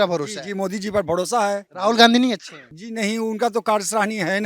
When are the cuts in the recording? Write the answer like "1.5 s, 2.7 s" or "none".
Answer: 1.6 s

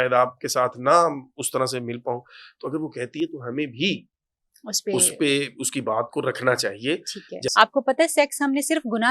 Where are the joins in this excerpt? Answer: 7.5 s

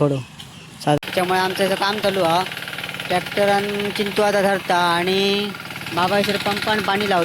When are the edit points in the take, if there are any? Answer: 1.0 s

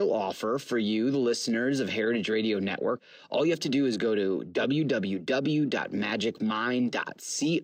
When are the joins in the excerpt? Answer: 3.0 s

